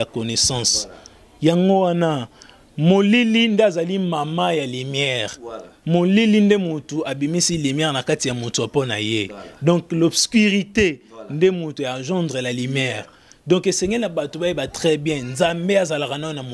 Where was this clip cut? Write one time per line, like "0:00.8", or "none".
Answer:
none